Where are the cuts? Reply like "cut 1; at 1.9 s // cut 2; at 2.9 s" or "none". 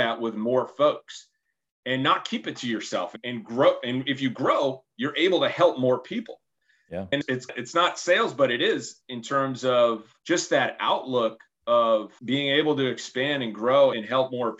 none